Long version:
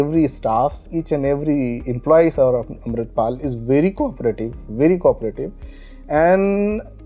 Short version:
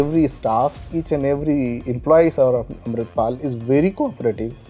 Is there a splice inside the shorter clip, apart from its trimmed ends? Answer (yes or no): no